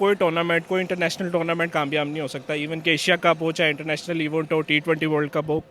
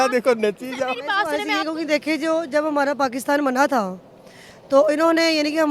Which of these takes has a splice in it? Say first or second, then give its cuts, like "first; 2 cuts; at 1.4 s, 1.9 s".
second; 1 cut; at 1.3 s